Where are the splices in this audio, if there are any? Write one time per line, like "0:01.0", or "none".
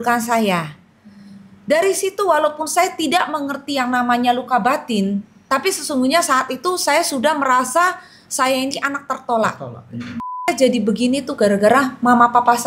0:10.5